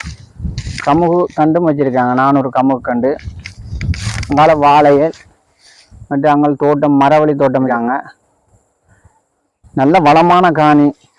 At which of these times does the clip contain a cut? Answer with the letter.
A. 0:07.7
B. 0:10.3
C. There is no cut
A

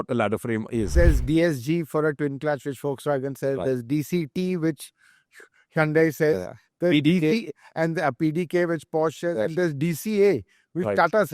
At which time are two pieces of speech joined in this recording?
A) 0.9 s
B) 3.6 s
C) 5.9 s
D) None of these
A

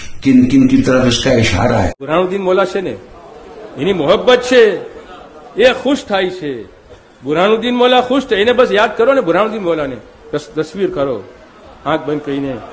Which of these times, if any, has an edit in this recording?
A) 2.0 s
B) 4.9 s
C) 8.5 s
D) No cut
A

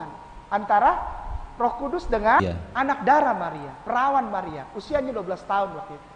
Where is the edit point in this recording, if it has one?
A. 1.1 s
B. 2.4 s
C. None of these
B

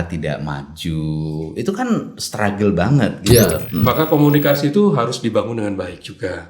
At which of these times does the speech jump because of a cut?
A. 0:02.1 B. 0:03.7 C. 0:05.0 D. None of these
B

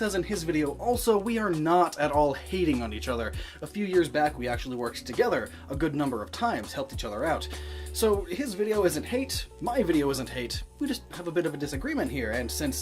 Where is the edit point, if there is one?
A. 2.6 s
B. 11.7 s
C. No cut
A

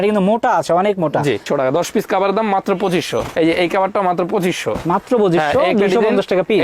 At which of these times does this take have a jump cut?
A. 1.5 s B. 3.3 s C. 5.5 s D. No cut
A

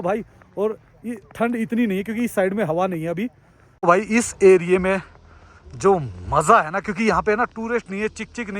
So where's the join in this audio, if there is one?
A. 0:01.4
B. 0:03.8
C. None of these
B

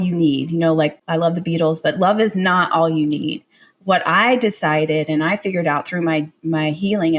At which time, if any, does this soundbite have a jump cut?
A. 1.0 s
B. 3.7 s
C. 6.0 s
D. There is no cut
D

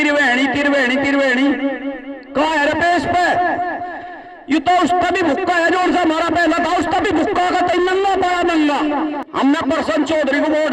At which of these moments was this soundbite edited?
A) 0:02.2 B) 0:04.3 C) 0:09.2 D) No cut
C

